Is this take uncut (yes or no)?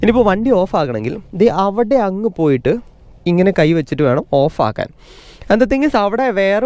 yes